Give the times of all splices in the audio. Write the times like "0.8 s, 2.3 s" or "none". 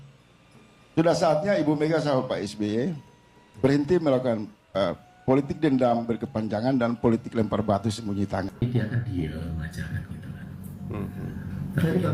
8.6 s

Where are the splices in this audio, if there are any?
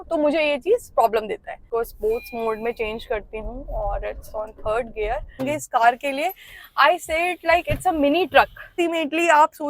1.7 s, 5.4 s, 8.7 s

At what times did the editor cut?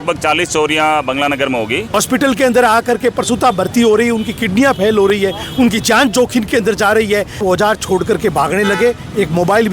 1.9 s, 7.4 s

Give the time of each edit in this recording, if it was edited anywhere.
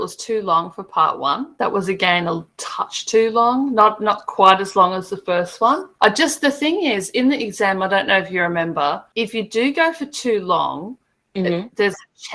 1.5 s, 5.9 s, 9.1 s

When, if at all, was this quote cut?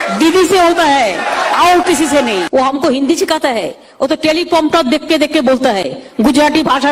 2.5 s

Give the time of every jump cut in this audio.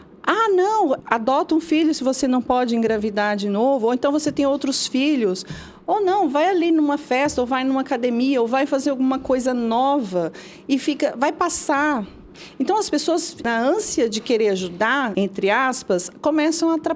1.0 s, 13.4 s, 15.1 s

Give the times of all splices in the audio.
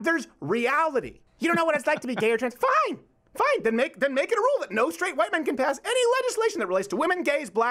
1.2 s

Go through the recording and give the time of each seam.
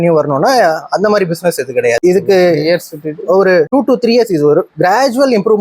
3.7 s

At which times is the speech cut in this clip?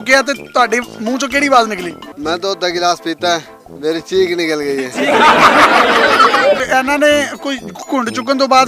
6.6 s

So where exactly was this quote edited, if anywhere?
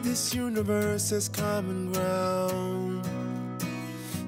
none

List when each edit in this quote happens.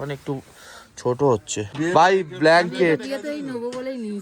1.7 s

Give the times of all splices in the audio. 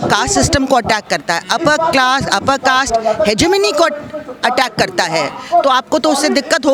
none

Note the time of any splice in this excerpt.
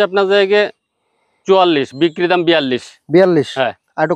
none

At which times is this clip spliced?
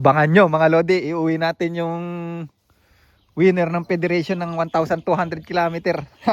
none

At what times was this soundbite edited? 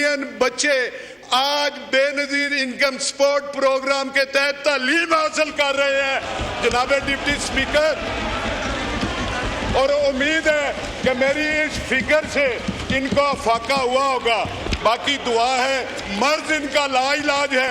none

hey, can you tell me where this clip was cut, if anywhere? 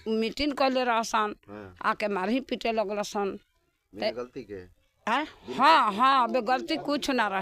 none

